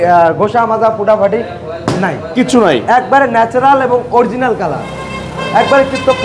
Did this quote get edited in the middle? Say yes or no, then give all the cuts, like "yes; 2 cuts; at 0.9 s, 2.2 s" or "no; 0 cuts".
no; 0 cuts